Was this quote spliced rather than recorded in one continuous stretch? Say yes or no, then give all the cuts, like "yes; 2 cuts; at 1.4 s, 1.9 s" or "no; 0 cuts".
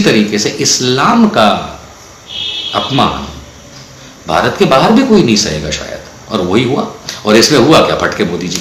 no; 0 cuts